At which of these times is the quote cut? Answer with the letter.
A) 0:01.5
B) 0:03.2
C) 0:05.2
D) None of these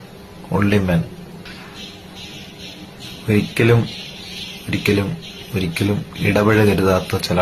A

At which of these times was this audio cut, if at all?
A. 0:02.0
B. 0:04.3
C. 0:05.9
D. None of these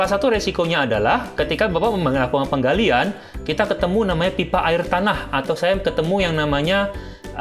D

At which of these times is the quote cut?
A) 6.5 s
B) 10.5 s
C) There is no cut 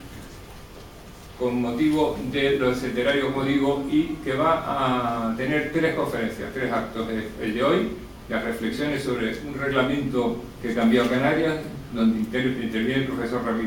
B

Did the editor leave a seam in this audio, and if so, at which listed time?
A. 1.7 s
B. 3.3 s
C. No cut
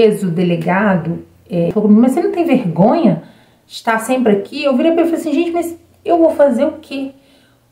A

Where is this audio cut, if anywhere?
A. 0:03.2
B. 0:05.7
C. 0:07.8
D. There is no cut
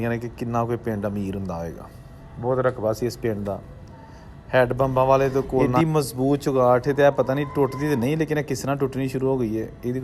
B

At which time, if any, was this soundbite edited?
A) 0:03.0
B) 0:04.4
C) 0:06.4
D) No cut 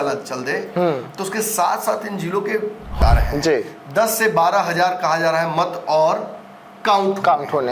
A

